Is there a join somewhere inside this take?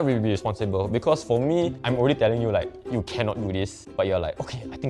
yes; 2 cuts; at 1.8 s, 3.8 s

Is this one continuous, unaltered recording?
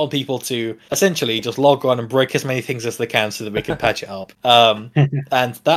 yes; 0 cuts

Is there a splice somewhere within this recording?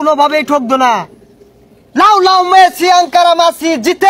no; 0 cuts

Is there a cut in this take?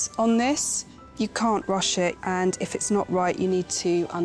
yes; 2 cuts; at 1.0 s, 2.2 s

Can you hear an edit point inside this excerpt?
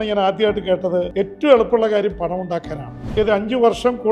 yes; 2 cuts; at 1.1 s, 2.9 s

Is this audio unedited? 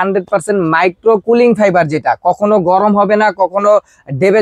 yes; 0 cuts

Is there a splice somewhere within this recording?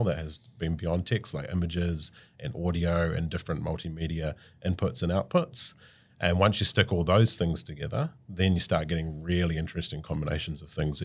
no; 0 cuts

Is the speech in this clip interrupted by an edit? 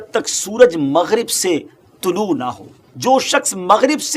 yes; 1 cut; at 2.9 s

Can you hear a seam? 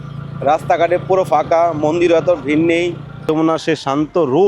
yes; 1 cut; at 3.2 s

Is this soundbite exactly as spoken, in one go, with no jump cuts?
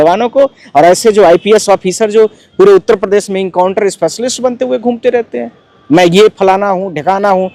yes; 0 cuts

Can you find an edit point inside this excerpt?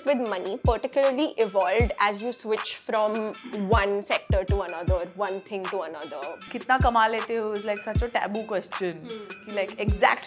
yes; 1 cut; at 6.5 s

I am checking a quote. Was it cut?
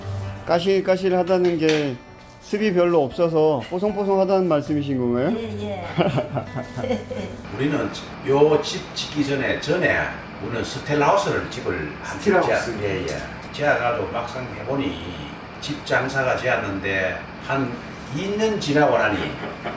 yes; 1 cut; at 7.4 s

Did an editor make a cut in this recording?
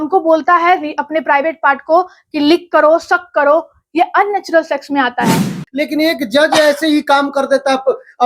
yes; 1 cut; at 5.6 s

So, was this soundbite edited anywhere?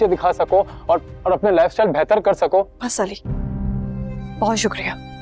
no; 0 cuts

